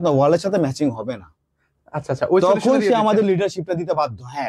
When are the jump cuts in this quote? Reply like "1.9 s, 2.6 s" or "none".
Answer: none

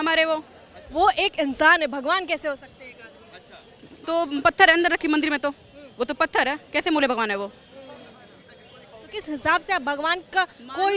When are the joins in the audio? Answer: none

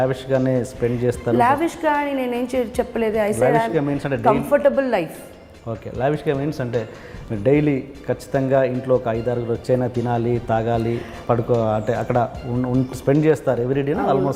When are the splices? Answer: none

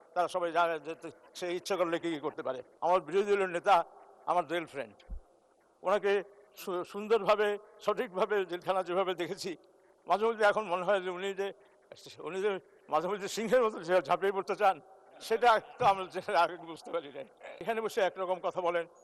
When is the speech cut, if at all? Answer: 2.7 s, 17.6 s

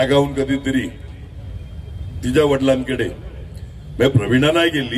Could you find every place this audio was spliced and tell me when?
none

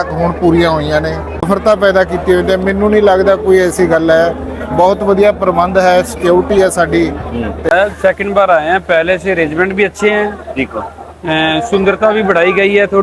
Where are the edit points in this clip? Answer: 1.5 s, 7.7 s

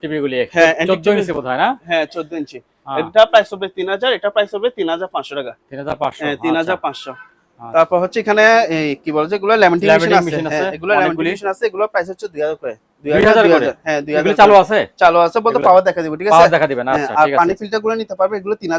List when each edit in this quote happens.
none

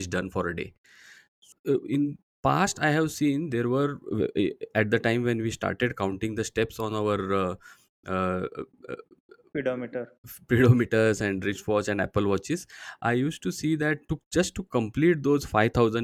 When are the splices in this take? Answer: 1.4 s

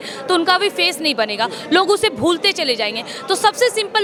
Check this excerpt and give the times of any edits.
none

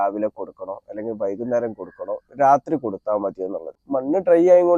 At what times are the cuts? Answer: 3.7 s

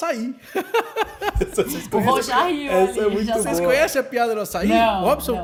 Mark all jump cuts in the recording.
none

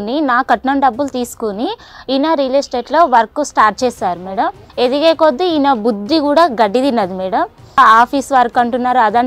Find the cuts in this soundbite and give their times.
4.6 s, 7.8 s

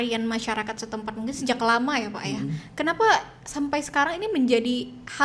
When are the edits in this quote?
none

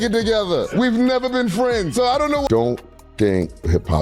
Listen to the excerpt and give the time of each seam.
2.5 s

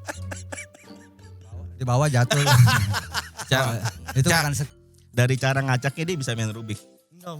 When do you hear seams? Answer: 4.7 s

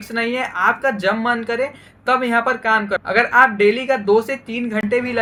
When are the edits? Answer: none

